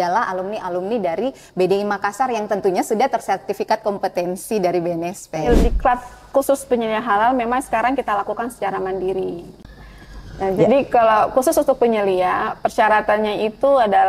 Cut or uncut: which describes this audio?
cut